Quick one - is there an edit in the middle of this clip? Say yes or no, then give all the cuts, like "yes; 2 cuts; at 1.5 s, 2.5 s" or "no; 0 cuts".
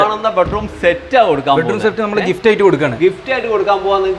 no; 0 cuts